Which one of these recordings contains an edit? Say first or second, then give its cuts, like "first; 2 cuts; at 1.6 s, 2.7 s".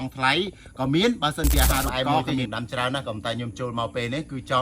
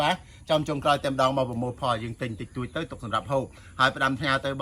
first; 1 cut; at 2.4 s